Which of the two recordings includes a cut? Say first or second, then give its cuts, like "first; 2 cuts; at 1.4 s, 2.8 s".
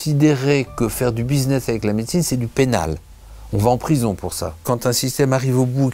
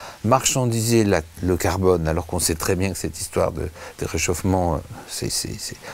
first; 1 cut; at 4.6 s